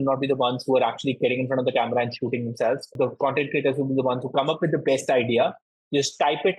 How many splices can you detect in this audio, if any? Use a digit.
1